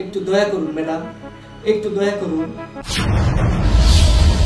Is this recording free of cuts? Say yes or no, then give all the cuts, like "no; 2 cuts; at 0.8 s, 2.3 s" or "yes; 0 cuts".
no; 1 cut; at 2.8 s